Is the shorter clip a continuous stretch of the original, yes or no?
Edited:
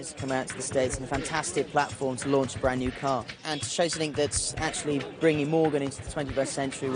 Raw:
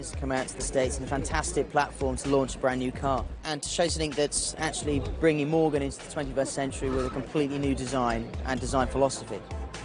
yes